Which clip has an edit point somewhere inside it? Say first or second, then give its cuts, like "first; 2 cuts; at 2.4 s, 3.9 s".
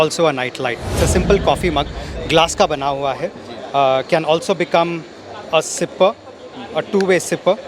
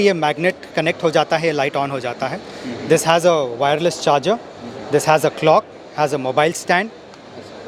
first; 1 cut; at 0.9 s